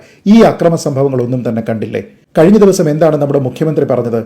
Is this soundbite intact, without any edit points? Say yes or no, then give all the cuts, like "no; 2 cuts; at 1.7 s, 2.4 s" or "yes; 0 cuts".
no; 1 cut; at 2.1 s